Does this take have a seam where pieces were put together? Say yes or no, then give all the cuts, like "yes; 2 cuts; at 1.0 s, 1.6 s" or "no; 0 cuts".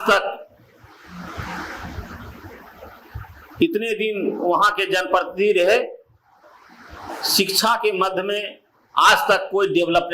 no; 0 cuts